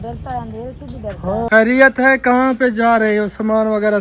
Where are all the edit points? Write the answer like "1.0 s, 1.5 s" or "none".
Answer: 1.5 s